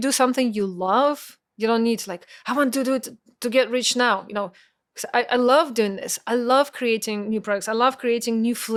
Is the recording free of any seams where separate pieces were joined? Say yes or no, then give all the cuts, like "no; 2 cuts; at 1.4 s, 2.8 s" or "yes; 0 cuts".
yes; 0 cuts